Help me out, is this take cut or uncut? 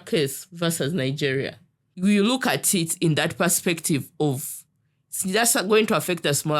cut